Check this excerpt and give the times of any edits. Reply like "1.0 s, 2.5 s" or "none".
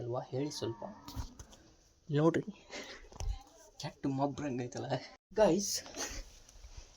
5.2 s